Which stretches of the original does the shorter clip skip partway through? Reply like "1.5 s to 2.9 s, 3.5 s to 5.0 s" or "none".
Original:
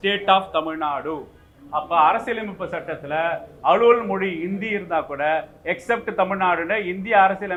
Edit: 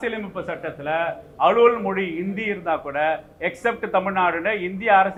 none